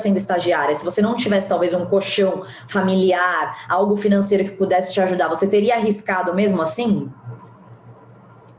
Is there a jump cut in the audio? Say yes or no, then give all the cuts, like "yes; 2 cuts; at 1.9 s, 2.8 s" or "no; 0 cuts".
no; 0 cuts